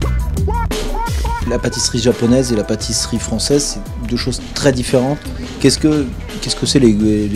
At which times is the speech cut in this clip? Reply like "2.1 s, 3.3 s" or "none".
2.2 s